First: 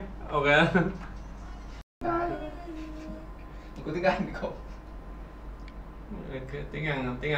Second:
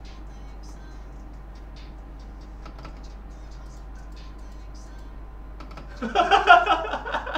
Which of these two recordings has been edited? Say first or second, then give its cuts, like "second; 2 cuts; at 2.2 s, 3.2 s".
first; 1 cut; at 1.9 s